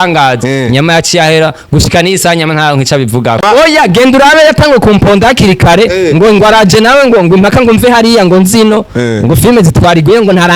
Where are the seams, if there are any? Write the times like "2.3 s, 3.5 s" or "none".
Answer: 3.4 s